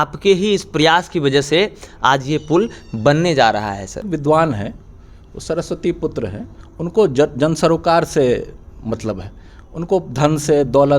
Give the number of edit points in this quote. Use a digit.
1